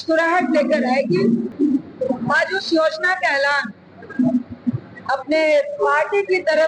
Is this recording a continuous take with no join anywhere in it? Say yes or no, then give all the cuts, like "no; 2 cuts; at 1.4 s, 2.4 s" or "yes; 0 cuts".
no; 1 cut; at 1.5 s